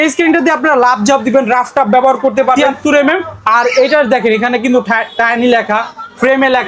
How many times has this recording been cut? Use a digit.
1